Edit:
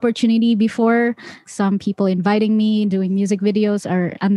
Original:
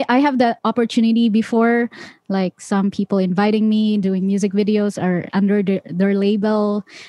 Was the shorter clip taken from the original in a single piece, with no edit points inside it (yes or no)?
no